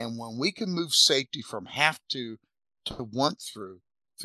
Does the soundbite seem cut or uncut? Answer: uncut